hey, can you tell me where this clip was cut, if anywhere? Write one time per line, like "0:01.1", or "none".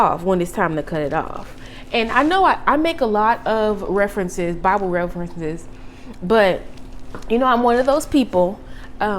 none